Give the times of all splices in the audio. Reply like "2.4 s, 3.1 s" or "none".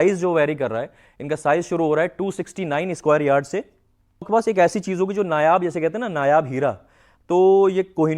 4.3 s